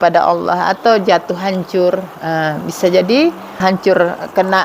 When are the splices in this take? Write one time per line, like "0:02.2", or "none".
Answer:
0:03.6